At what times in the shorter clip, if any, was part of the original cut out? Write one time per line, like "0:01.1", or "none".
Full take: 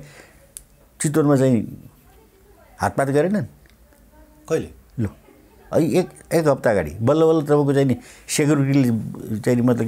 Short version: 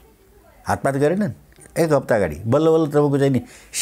0:01.6